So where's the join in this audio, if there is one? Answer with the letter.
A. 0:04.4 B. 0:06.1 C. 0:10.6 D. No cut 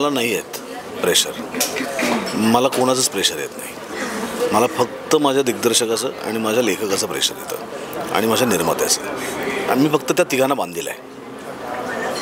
D